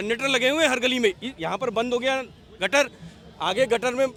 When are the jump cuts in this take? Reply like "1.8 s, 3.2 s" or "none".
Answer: none